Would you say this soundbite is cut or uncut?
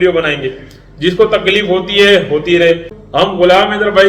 cut